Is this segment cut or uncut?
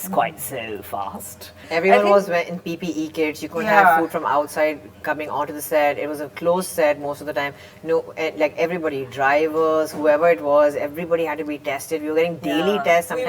cut